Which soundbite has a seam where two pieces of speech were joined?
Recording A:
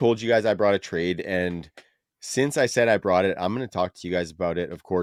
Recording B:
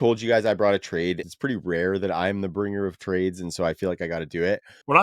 B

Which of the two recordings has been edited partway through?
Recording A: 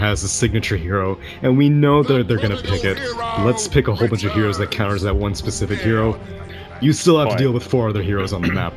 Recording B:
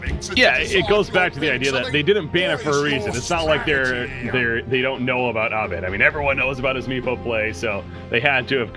A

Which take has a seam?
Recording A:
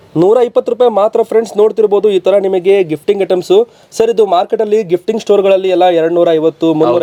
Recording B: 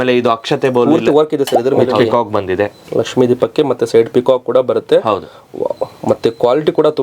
B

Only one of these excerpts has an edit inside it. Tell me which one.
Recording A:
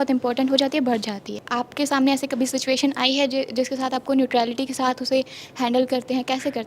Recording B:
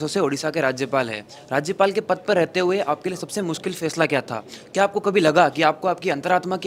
A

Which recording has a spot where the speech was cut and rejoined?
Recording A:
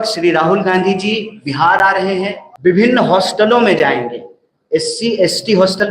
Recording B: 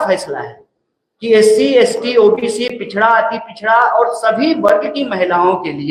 A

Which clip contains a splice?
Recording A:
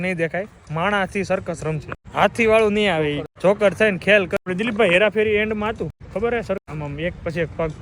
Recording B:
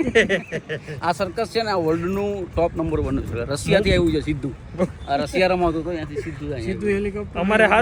A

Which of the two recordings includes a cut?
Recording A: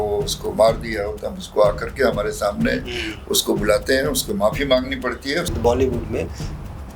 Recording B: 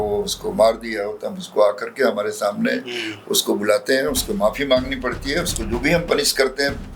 A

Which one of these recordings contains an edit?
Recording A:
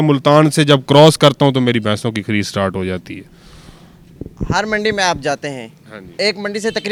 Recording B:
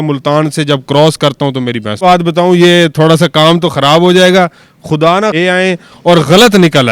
B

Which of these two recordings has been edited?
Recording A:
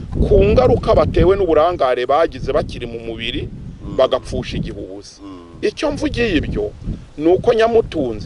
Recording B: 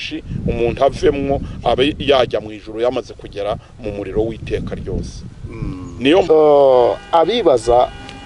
B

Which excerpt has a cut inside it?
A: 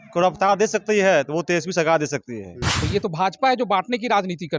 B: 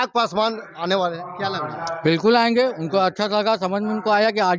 A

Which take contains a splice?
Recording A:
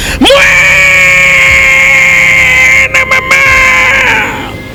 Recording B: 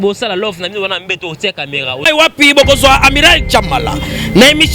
B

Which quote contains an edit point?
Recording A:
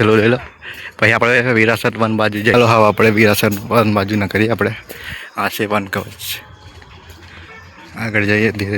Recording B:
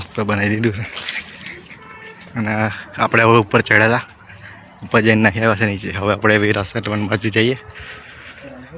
A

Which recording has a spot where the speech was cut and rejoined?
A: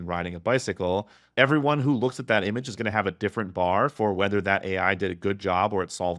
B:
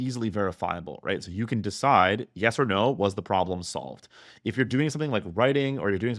A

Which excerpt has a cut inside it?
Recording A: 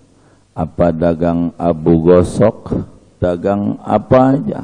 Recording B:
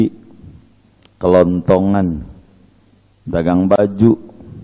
A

